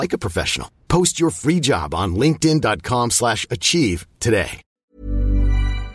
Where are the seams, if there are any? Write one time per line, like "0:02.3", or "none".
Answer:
0:04.6